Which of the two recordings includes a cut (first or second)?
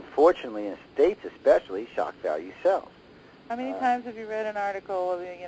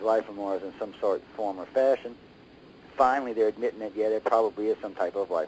second